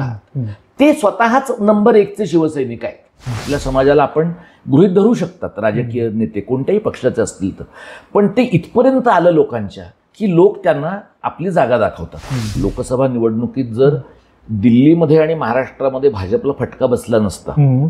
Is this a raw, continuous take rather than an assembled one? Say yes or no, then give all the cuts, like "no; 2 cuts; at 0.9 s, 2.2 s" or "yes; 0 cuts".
no; 2 cuts; at 3.4 s, 12.5 s